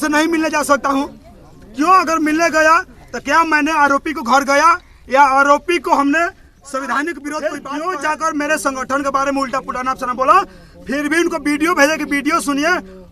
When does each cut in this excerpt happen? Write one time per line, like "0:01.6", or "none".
0:07.4